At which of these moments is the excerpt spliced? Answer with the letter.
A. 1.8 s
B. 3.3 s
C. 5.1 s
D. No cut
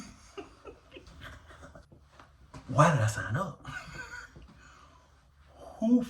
A